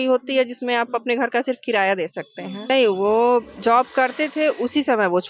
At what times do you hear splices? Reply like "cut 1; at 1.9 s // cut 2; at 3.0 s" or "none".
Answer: cut 1; at 2.6 s